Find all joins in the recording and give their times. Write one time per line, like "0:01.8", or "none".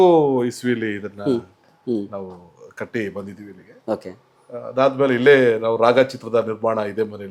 none

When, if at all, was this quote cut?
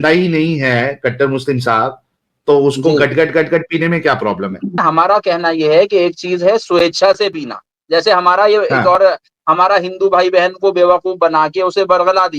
0:04.8

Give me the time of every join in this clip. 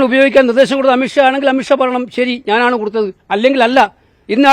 none

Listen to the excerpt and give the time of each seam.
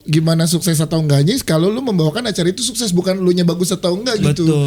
none

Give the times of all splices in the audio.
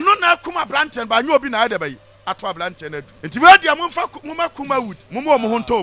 0:03.1
0:05.0

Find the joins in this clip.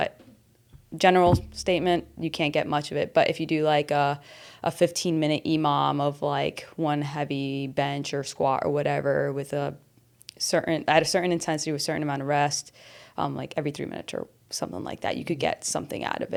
none

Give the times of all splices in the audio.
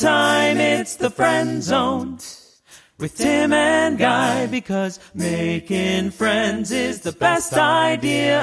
none

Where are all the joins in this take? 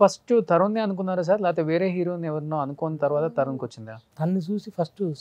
0:04.1

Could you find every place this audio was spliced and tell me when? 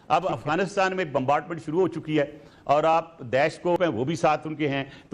0:03.8

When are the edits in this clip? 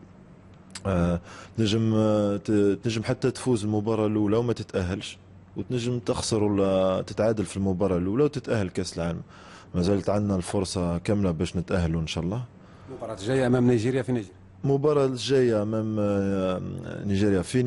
0:02.2

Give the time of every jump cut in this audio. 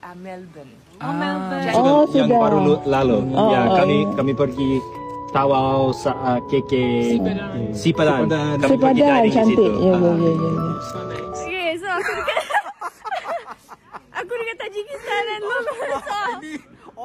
0:01.7
0:11.5

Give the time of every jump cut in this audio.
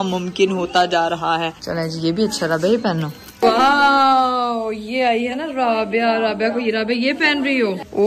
none

